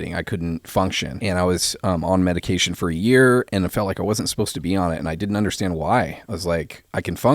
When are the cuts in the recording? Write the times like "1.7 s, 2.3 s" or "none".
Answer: 1.1 s